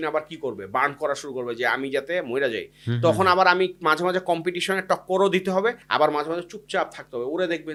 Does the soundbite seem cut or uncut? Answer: uncut